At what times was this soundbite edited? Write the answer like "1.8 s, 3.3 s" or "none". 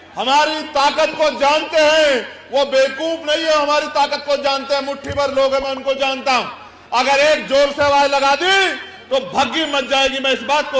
none